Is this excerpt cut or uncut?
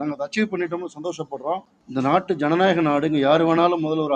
cut